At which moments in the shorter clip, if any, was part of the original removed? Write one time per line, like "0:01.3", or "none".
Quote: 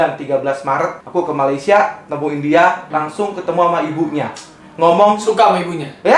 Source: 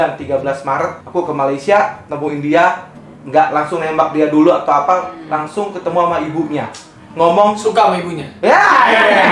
0:02.9